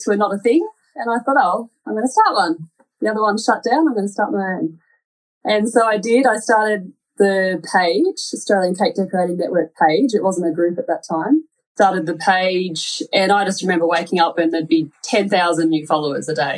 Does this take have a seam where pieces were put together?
yes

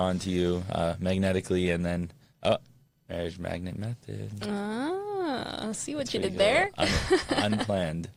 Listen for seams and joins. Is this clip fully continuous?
yes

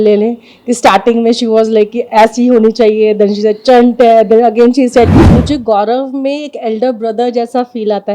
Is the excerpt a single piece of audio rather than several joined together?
no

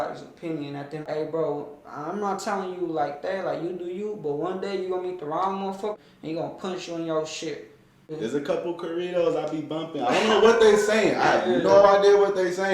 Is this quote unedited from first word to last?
no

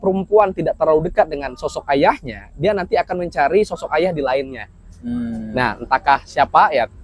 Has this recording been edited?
no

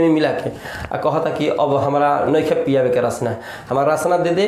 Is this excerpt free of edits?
yes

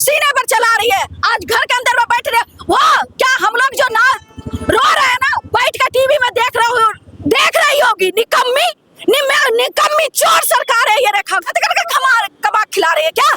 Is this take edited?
yes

